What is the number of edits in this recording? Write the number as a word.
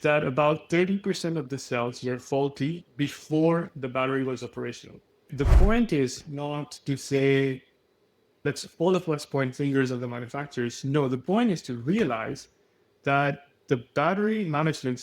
one